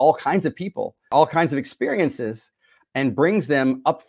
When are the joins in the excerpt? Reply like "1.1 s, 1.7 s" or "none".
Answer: 1.1 s